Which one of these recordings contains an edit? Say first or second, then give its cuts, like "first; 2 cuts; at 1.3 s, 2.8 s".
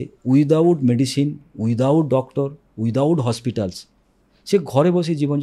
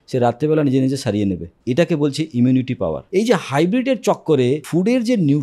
second; 3 cuts; at 1.5 s, 3.0 s, 4.6 s